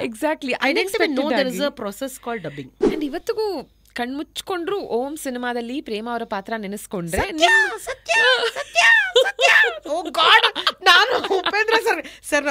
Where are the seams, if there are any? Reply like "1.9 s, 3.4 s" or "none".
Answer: 2.8 s